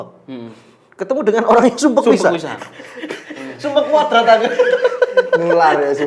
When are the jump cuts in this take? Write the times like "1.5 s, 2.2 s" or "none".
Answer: none